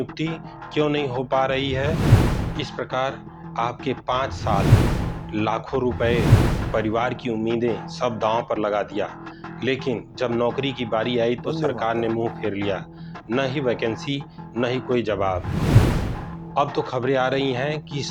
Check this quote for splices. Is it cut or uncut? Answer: uncut